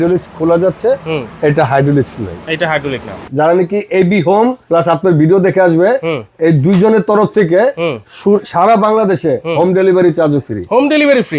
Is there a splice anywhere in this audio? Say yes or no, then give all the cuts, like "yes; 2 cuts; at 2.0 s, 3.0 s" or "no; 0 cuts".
yes; 2 cuts; at 3.3 s, 4.6 s